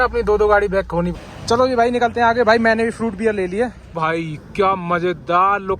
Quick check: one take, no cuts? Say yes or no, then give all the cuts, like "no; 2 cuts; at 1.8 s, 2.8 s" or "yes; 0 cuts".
no; 2 cuts; at 1.2 s, 3.9 s